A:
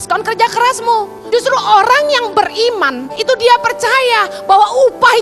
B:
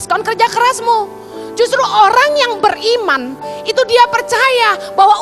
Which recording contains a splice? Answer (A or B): A